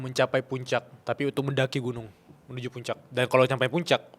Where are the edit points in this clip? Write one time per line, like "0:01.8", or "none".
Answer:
0:00.9
0:03.0